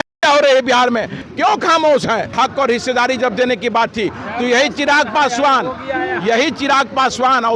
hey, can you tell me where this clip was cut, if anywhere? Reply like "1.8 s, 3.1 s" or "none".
1.2 s, 2.3 s